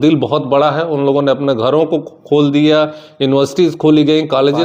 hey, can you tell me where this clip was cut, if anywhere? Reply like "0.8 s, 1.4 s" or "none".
none